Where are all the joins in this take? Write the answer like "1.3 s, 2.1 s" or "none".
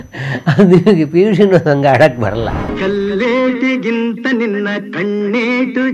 2.6 s

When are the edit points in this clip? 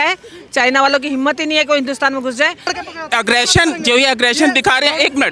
2.8 s

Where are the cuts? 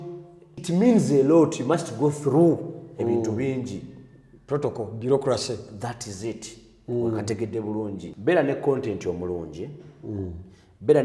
8.1 s

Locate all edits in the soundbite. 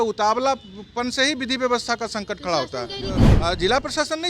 3.3 s

